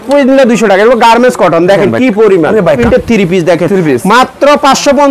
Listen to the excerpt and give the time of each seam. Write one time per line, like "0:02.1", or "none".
0:02.8